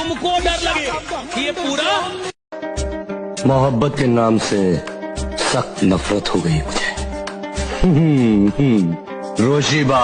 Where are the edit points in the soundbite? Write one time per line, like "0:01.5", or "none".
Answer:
0:02.4